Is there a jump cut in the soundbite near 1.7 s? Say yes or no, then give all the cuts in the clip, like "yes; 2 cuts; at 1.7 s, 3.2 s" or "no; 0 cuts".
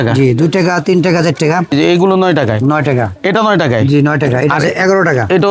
yes; 1 cut; at 1.7 s